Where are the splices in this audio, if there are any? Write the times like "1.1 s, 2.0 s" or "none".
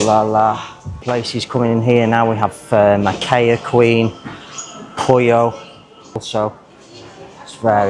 1.0 s, 6.2 s